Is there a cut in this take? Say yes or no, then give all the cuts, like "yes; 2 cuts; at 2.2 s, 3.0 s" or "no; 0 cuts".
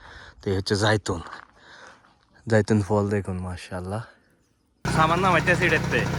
yes; 1 cut; at 4.9 s